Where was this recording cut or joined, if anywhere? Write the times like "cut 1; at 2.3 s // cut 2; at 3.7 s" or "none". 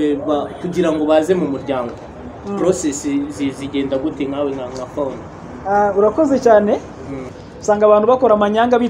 cut 1; at 7.3 s